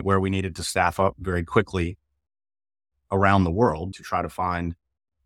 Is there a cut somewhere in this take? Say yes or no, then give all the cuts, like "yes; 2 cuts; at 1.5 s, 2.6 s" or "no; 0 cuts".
yes; 1 cut; at 3.9 s